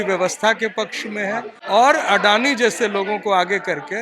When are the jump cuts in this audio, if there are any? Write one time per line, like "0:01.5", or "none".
0:01.5